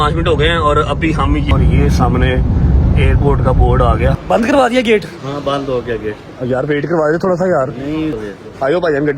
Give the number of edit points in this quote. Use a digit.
3